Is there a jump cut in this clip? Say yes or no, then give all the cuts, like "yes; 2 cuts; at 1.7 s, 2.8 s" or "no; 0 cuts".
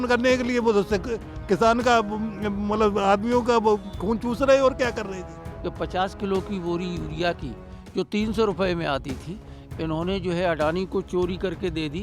yes; 1 cut; at 5.5 s